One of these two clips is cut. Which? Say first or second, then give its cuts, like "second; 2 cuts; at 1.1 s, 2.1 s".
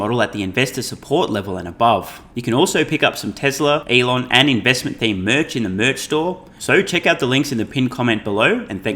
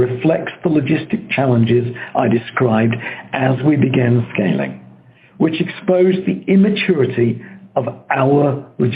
first; 3 cuts; at 2.2 s, 3.8 s, 6.5 s